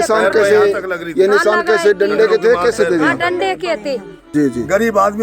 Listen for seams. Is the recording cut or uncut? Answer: cut